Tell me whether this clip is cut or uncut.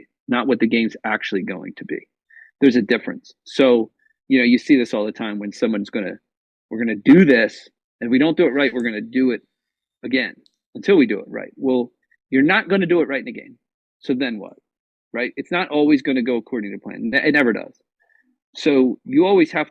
uncut